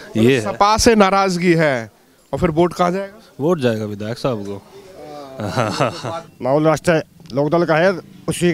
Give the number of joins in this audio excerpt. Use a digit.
1